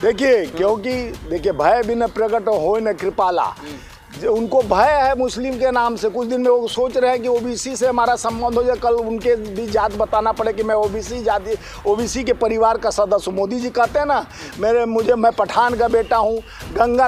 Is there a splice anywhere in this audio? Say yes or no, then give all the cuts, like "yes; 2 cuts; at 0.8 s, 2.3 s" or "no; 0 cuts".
no; 0 cuts